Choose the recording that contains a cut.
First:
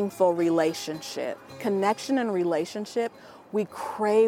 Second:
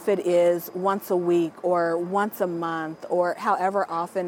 first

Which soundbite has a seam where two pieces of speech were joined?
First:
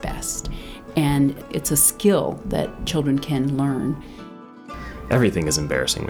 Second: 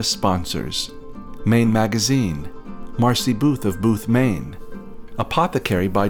first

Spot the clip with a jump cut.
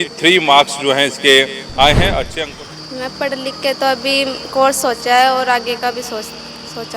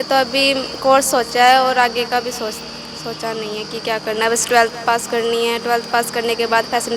first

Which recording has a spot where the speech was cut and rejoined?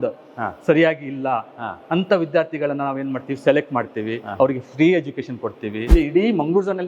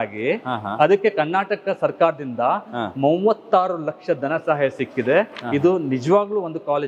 first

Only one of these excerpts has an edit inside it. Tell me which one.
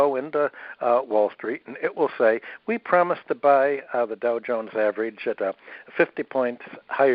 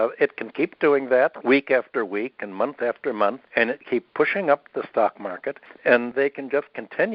second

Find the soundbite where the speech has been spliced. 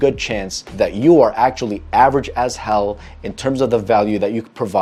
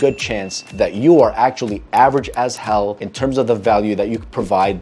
second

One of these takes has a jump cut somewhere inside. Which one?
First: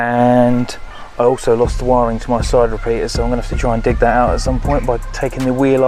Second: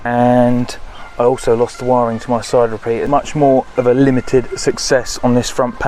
second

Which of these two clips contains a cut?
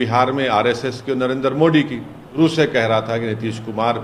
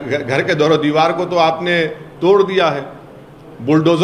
first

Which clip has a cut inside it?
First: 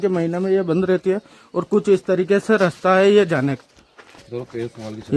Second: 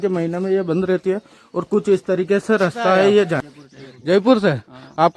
second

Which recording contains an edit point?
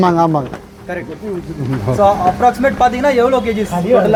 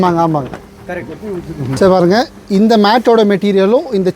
second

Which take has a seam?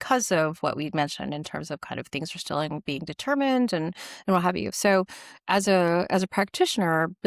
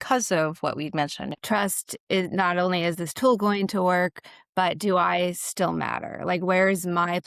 second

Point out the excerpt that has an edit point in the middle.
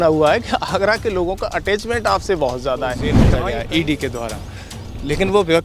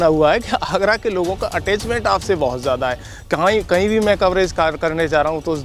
first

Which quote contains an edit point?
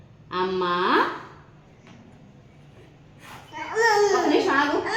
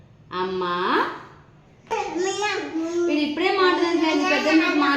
second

